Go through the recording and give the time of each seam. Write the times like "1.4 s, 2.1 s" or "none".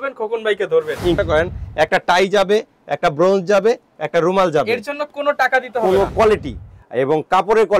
1.2 s, 6.1 s